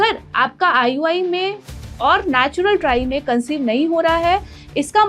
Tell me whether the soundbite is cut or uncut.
uncut